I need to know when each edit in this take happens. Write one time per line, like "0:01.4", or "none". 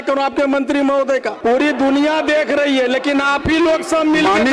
0:01.3